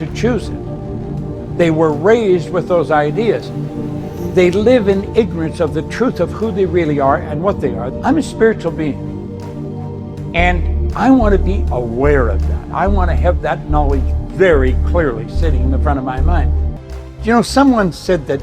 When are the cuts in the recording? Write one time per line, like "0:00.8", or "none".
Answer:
0:16.7